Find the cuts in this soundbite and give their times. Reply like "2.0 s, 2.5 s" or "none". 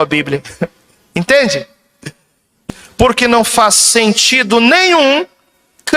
2.6 s